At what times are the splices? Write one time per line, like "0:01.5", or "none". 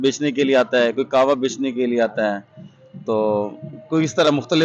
none